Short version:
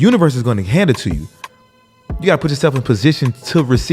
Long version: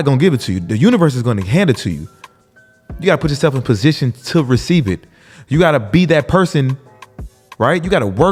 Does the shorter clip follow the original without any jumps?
yes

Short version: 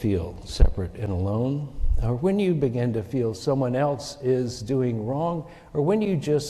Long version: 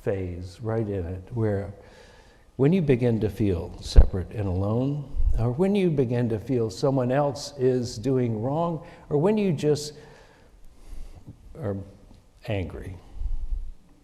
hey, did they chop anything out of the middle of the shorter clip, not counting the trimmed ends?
no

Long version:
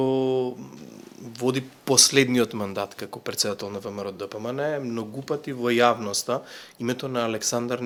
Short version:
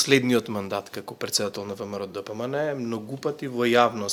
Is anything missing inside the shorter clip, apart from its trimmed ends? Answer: no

